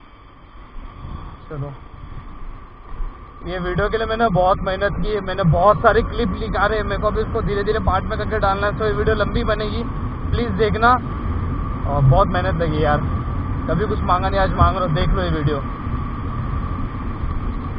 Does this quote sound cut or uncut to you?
uncut